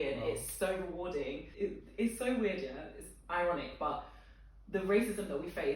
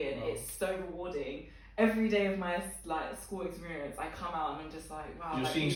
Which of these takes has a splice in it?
first; 1 cut; at 1.5 s

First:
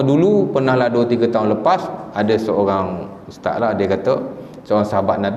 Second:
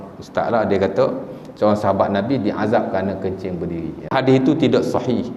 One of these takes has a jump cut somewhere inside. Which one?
second; 1 cut; at 4.1 s

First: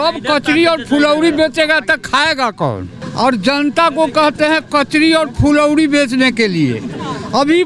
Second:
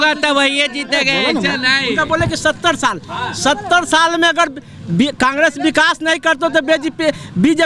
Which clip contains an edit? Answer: first; 1 cut; at 3.0 s

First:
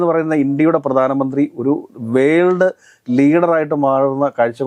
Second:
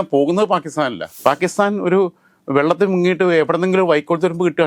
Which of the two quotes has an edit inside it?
second; 1 cut; at 1.1 s

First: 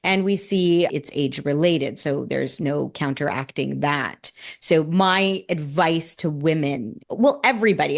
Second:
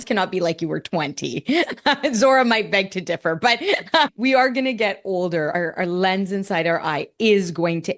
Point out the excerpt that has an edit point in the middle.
first; 1 cut; at 7.0 s

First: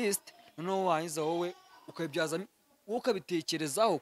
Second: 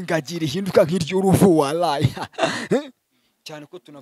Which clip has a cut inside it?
second; 1 cut; at 3.0 s

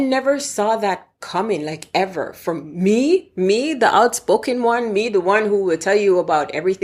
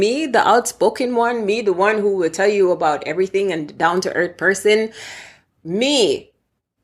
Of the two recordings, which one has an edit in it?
second; 1 cut; at 5.6 s

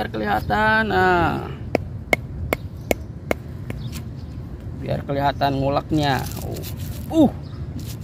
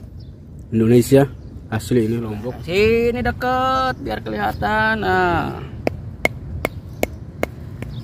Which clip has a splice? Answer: second; 1 cut; at 2.3 s

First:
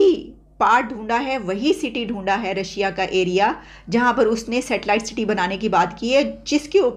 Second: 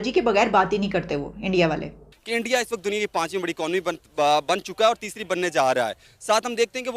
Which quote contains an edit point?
second; 1 cut; at 2.2 s

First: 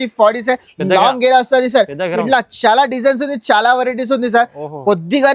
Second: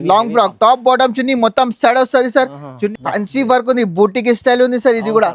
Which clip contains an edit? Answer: second; 1 cut; at 2.9 s

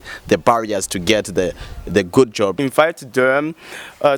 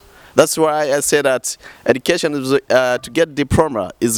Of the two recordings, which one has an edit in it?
first; 1 cut; at 2.6 s

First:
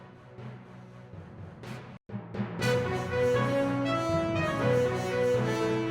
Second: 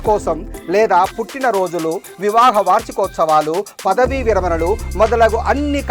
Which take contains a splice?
first; 1 cut; at 1.9 s

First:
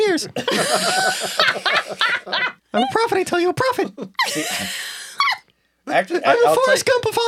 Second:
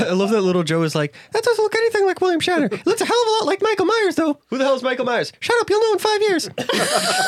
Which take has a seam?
first; 1 cut; at 2.6 s

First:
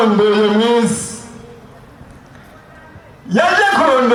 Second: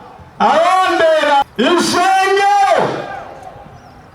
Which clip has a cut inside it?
second; 1 cut; at 1.4 s

